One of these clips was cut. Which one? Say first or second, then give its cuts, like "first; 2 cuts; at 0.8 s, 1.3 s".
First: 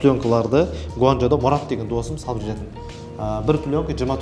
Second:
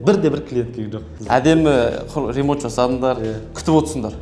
second; 1 cut; at 1.1 s